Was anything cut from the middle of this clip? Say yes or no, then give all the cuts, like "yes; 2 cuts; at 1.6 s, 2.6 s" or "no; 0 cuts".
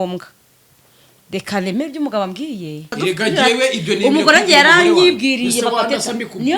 yes; 1 cut; at 2.9 s